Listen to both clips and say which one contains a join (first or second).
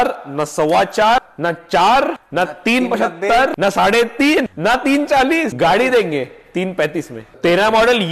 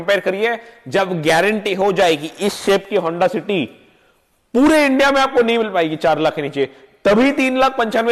first